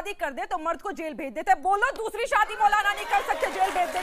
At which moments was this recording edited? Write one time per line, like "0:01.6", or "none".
none